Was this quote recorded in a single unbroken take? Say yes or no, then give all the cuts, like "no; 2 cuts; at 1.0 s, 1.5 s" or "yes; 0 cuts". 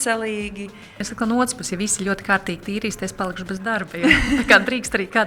no; 1 cut; at 1.1 s